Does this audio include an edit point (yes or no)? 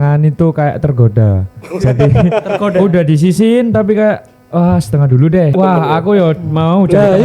yes